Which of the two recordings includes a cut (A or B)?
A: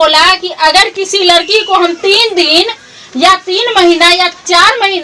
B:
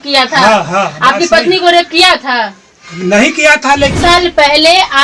B